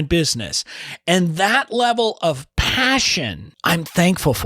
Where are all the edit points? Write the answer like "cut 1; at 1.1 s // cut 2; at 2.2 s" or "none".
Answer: cut 1; at 3.4 s